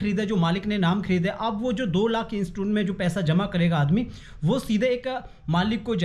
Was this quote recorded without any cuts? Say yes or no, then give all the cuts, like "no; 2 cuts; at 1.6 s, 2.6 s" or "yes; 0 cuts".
yes; 0 cuts